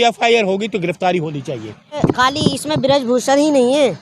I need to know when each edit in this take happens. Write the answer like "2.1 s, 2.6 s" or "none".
2.0 s